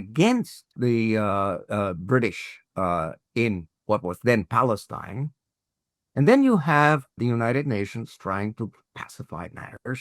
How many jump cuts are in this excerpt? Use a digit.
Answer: 3